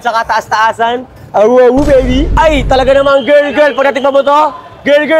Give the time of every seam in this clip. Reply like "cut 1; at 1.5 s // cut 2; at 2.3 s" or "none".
cut 1; at 2.3 s